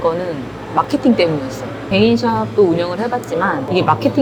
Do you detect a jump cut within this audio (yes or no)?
no